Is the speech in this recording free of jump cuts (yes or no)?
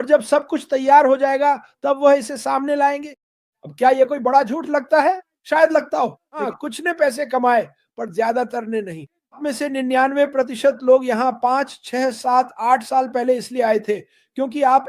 no